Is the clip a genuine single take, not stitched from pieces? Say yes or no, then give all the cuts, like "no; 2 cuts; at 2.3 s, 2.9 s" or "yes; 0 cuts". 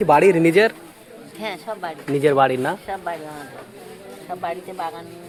yes; 0 cuts